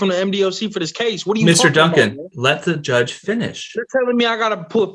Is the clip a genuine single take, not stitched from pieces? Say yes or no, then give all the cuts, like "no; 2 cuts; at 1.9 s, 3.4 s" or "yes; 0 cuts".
yes; 0 cuts